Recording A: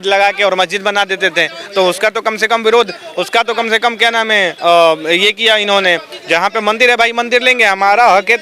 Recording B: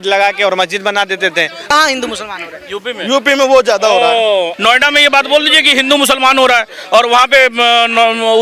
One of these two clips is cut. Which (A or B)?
B